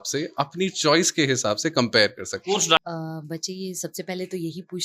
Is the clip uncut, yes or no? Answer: no